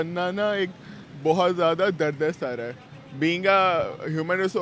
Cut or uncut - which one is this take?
uncut